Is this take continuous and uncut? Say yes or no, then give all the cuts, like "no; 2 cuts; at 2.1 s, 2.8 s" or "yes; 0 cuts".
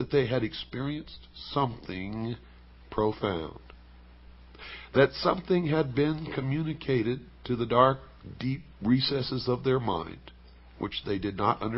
yes; 0 cuts